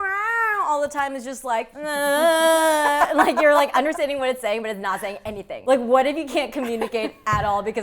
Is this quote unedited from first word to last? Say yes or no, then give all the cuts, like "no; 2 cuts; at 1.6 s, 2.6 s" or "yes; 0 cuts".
no; 2 cuts; at 1.8 s, 5.5 s